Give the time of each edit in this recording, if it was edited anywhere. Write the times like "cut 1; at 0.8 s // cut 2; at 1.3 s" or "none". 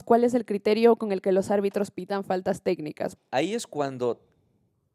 cut 1; at 3.2 s